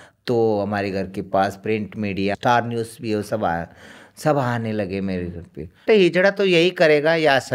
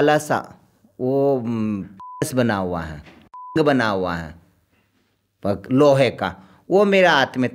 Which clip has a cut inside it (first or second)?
first